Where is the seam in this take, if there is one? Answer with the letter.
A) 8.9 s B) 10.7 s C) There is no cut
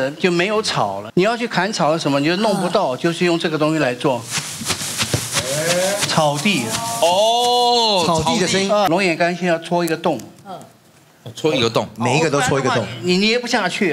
A